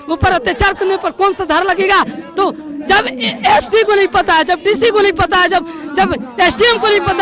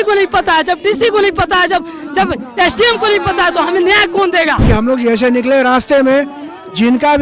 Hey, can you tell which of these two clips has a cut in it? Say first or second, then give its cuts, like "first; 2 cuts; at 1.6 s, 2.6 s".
second; 1 cut; at 4.6 s